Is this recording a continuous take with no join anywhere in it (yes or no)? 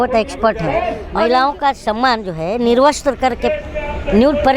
no